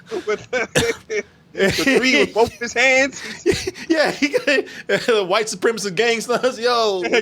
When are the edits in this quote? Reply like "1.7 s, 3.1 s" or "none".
none